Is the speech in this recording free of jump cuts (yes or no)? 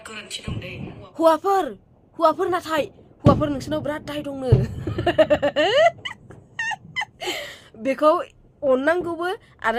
yes